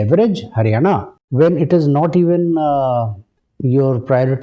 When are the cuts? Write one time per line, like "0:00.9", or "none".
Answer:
0:01.2